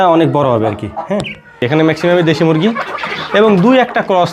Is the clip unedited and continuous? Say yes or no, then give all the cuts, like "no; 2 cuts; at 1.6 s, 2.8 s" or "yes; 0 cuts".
no; 1 cut; at 1.6 s